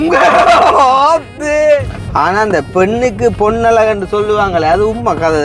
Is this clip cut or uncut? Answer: cut